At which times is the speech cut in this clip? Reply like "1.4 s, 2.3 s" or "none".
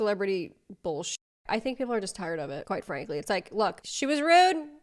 none